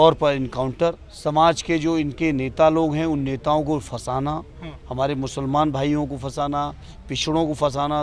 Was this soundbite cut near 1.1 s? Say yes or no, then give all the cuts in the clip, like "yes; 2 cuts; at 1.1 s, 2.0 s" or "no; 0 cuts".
yes; 1 cut; at 1.1 s